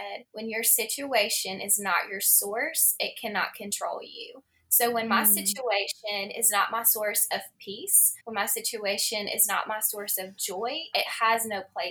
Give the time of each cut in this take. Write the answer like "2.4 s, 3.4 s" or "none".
none